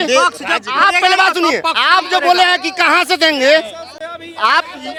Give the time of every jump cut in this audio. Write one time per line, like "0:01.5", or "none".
none